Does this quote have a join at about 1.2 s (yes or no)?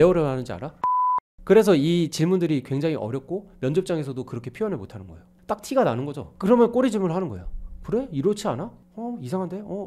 yes